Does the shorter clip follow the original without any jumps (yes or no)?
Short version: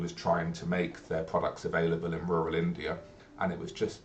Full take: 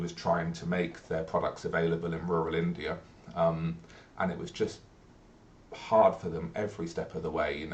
no